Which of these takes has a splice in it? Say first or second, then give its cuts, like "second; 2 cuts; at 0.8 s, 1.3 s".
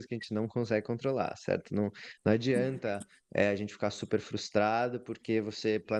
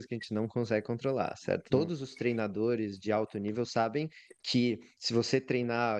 second; 1 cut; at 1.6 s